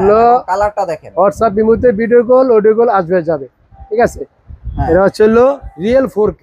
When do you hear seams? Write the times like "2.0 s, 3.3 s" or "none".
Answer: none